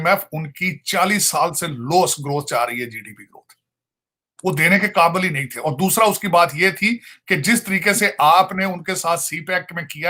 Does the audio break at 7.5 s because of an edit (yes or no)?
no